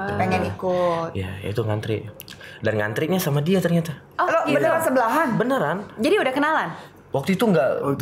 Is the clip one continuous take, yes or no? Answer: yes